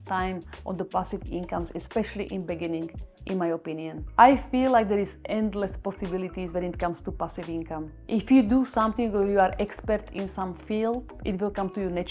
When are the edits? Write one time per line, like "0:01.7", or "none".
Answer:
0:03.9
0:11.1